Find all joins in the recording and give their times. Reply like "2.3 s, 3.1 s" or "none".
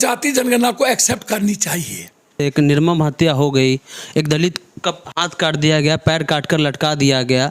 2.4 s